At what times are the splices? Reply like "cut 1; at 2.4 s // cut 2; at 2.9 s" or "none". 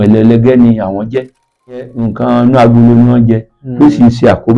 cut 1; at 1.9 s